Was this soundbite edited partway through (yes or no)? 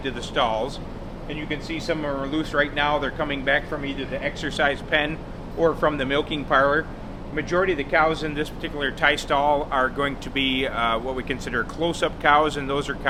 no